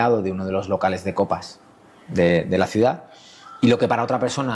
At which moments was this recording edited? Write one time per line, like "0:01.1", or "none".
none